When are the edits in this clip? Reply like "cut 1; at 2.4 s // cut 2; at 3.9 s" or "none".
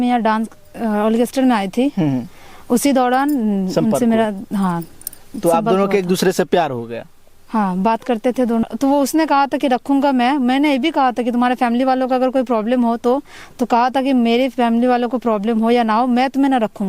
cut 1; at 8.6 s